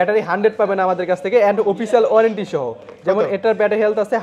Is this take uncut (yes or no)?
yes